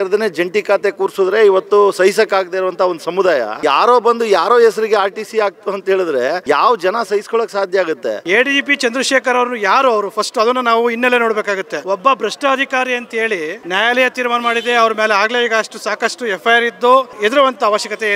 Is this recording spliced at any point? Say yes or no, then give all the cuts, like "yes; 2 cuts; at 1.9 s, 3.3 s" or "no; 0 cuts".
yes; 6 cuts; at 3.6 s, 6.4 s, 8.2 s, 11.7 s, 13.6 s, 17.1 s